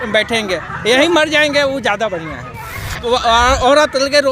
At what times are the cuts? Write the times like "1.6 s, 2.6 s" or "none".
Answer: 3.0 s